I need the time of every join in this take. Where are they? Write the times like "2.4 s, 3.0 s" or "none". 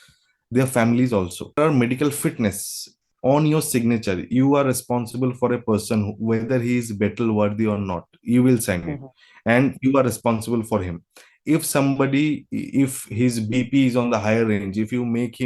1.6 s